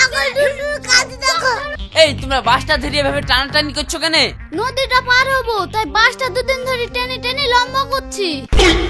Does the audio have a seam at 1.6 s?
yes; 1 cut; at 1.6 s

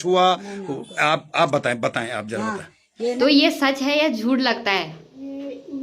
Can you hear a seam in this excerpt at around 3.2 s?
yes; 1 cut; at 3.2 s

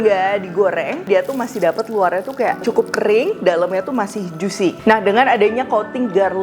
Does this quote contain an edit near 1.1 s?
yes; 3 cuts; at 1.1 s, 2.6 s, 4.8 s

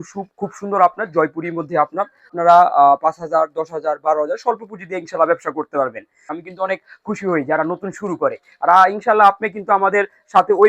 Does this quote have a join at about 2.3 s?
yes; 2 cuts; at 2.3 s, 6.3 s

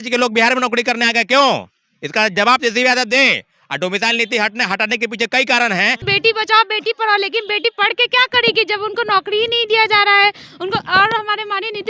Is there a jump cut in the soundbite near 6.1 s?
yes; 1 cut; at 6.1 s

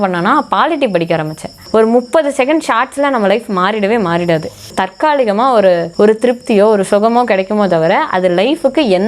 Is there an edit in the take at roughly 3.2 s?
no; 3 cuts; at 1.6 s, 4.7 s, 5.9 s

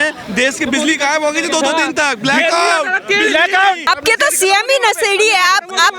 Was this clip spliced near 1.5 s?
no; 1 cut; at 3.8 s

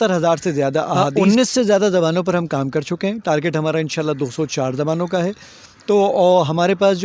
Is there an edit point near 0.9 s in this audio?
yes; 1 cut; at 0.9 s

